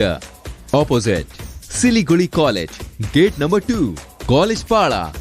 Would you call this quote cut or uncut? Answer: uncut